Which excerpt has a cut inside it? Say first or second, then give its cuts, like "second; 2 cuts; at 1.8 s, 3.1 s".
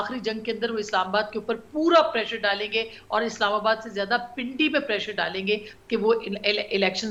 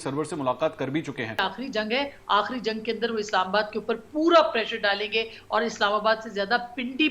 second; 1 cut; at 1.5 s